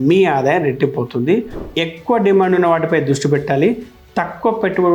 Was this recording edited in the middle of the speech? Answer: yes; 1 cut; at 1.5 s

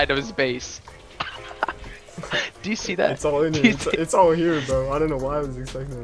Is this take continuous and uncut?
yes; 0 cuts

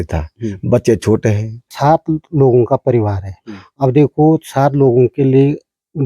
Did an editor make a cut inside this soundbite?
yes; 1 cut; at 1.7 s

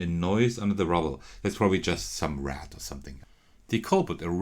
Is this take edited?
yes; 1 cut; at 3.0 s

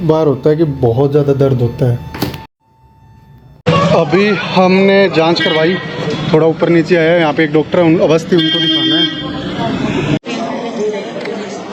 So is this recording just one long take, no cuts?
yes; 0 cuts

